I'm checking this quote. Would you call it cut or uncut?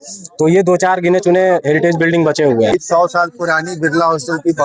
cut